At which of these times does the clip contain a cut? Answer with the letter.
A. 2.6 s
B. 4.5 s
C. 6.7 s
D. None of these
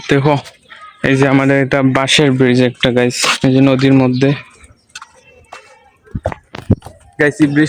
D